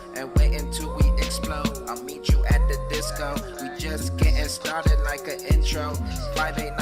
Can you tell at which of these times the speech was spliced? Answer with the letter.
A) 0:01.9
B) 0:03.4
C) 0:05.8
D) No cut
C